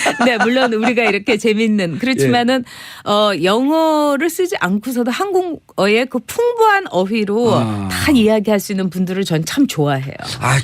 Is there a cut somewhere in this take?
yes; 1 cut; at 3.0 s

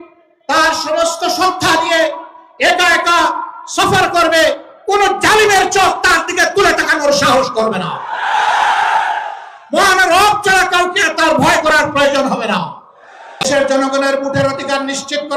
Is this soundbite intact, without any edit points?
no; 1 cut; at 13.4 s

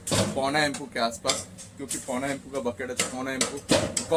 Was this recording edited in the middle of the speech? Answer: no; 0 cuts

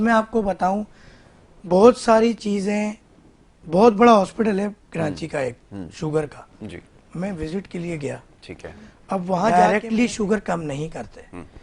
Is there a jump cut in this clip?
yes; 1 cut; at 9.5 s

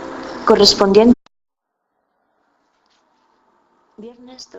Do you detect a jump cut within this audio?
no; 0 cuts

